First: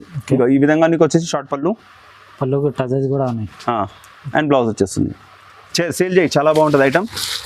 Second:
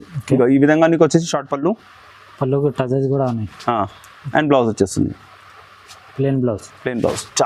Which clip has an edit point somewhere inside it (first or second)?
first